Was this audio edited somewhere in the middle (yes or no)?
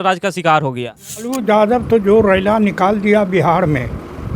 yes